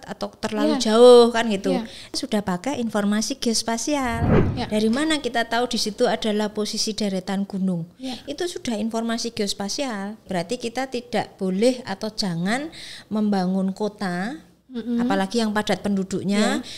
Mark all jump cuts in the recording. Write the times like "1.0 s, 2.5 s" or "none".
2.1 s, 4.3 s, 10.2 s